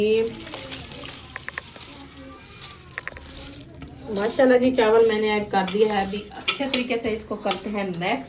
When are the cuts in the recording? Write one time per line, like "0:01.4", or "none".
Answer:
none